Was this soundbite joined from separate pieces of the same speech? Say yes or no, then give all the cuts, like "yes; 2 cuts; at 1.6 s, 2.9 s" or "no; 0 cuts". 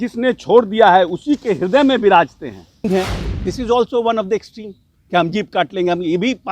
yes; 1 cut; at 2.8 s